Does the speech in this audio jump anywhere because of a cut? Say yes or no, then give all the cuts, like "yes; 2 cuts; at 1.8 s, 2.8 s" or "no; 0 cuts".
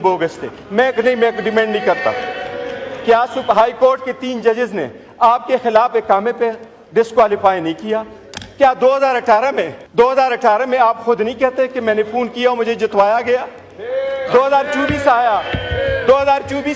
yes; 1 cut; at 9.8 s